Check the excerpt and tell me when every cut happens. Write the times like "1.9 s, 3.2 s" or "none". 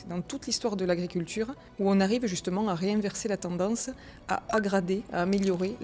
1.6 s